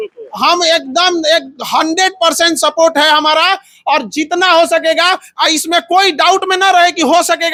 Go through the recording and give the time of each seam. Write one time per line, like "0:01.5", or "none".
none